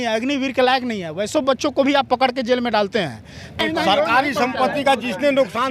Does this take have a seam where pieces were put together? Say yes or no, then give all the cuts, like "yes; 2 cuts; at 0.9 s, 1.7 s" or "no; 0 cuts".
yes; 1 cut; at 3.6 s